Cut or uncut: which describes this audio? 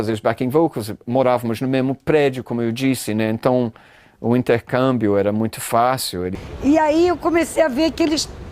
cut